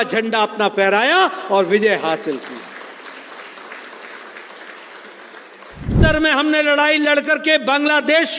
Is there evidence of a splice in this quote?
yes; 1 cut; at 5.9 s

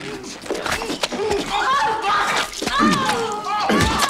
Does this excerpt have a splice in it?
no; 0 cuts

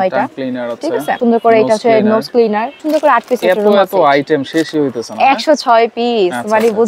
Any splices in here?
yes; 2 cuts; at 1.2 s, 2.8 s

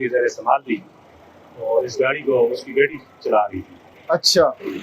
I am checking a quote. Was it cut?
no; 0 cuts

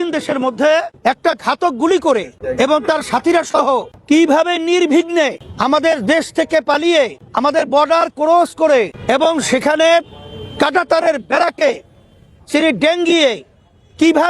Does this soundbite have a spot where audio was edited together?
yes; 6 cuts; at 0.9 s, 2.4 s, 3.9 s, 5.5 s, 7.2 s, 9.0 s

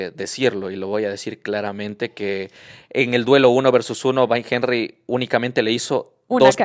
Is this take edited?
no; 0 cuts

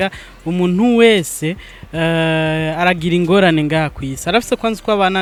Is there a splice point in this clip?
no; 0 cuts

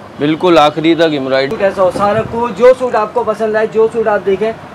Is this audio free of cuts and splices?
no; 1 cut; at 1.5 s

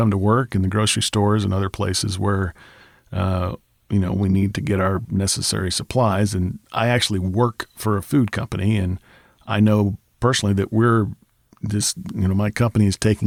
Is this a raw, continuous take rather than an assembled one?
yes; 0 cuts

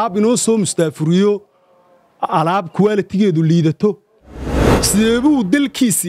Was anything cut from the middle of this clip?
no; 0 cuts

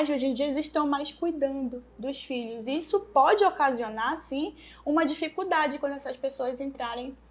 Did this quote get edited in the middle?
no; 0 cuts

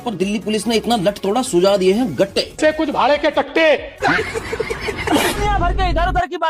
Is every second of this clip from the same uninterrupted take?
no; 1 cut; at 5.4 s

